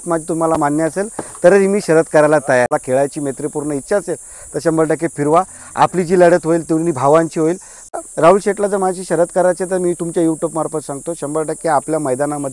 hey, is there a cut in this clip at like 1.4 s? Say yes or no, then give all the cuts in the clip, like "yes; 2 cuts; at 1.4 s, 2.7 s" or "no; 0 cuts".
no; 2 cuts; at 2.7 s, 7.9 s